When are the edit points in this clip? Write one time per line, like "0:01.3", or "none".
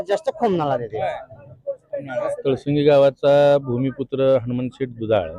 0:02.3